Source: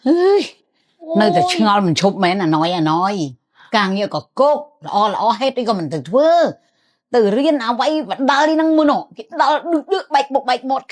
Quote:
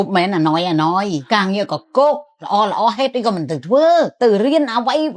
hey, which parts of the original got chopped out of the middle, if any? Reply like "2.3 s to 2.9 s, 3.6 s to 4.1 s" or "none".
3.3 s to 3.6 s, 6.5 s to 7.0 s